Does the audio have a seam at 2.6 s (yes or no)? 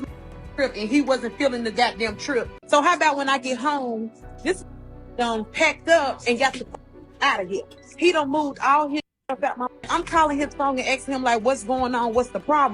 yes